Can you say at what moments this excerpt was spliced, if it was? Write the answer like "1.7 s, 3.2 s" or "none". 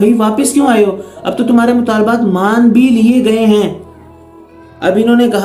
none